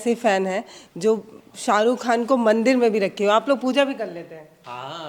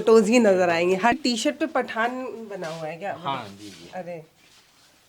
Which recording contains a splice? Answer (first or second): second